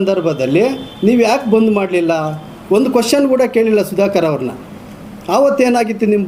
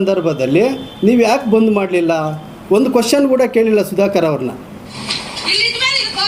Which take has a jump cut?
second; 1 cut; at 4.9 s

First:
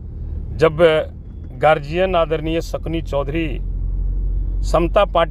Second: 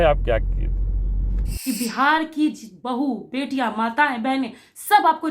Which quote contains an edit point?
second; 1 cut; at 1.5 s

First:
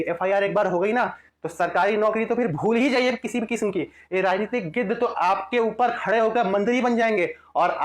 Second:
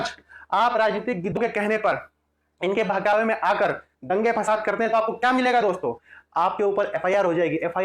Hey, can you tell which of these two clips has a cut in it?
second; 1 cut; at 1.4 s

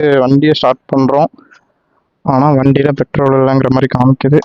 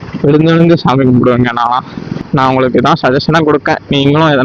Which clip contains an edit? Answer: second; 1 cut; at 2.2 s

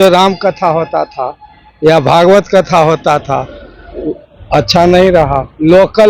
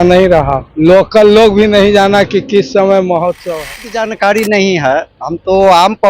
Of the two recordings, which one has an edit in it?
second; 1 cut; at 4.1 s

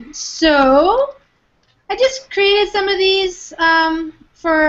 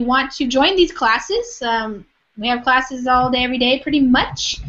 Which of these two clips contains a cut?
second; 1 cut; at 2.7 s

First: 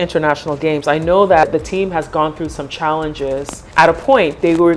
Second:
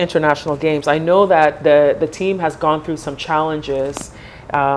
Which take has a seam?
first; 2 cuts; at 1.4 s, 3.6 s

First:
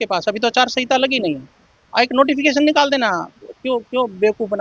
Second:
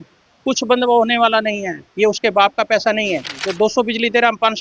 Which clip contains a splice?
second; 1 cut; at 3.4 s

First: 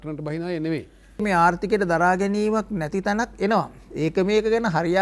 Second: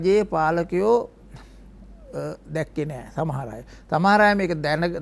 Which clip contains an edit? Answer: first; 1 cut; at 1.2 s

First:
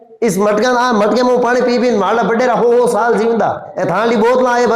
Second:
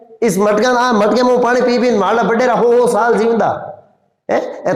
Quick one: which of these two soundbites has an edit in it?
first; 1 cut; at 3.7 s

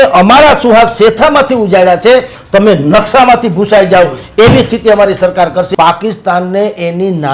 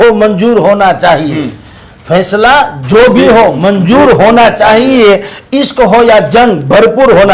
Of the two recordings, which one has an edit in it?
first; 1 cut; at 5.7 s

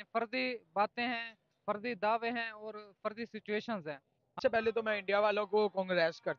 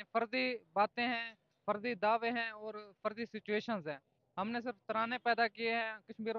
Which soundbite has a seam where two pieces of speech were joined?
first; 1 cut; at 4.4 s

